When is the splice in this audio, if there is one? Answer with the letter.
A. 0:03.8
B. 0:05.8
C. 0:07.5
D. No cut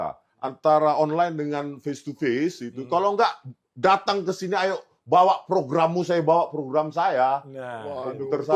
D